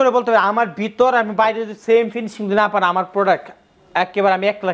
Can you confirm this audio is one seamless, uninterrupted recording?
yes; 0 cuts

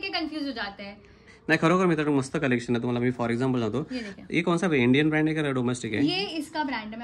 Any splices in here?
no; 0 cuts

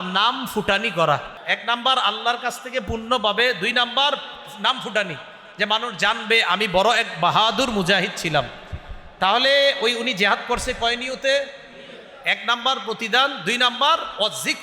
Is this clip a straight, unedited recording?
no; 1 cut; at 1.3 s

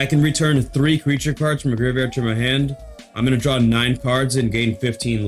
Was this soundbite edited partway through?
no; 0 cuts

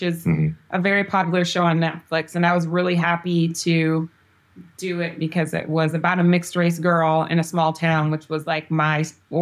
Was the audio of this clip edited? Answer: no; 0 cuts

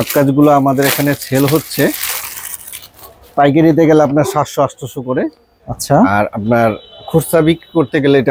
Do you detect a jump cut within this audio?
no; 0 cuts

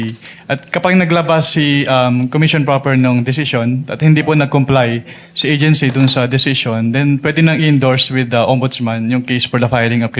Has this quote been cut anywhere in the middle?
no; 0 cuts

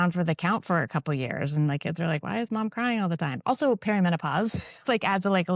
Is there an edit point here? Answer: no; 0 cuts

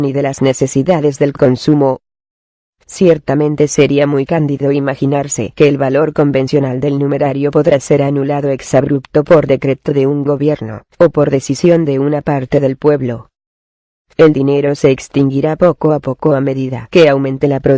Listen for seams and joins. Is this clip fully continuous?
yes; 0 cuts

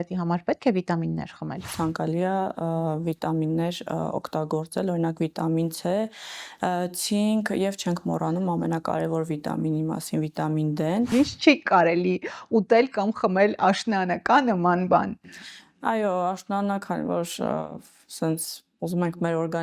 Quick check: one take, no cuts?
no; 2 cuts; at 1.7 s, 11.1 s

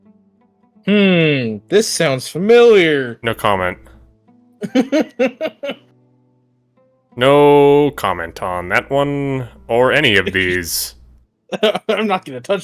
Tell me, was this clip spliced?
no; 0 cuts

